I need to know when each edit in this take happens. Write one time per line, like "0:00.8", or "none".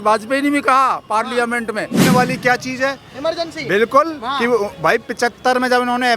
0:02.0